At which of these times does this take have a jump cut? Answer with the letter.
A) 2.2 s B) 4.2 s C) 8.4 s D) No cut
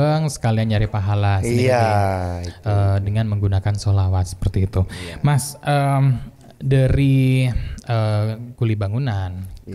D